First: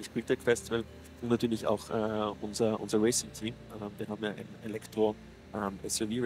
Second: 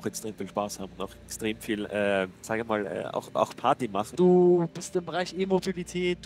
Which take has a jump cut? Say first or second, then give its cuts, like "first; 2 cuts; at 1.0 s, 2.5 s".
second; 2 cuts; at 2.4 s, 4.1 s